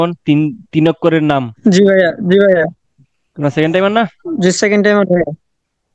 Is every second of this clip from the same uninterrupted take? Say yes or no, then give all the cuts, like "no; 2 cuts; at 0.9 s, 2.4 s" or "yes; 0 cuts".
yes; 0 cuts